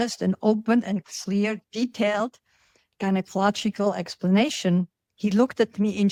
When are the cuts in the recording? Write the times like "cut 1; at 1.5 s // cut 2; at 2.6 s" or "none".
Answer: none